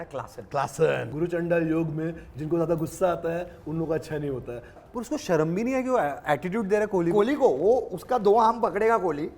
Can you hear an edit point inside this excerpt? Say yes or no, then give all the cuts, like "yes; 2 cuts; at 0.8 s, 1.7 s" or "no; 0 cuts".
yes; 2 cuts; at 1.1 s, 4.8 s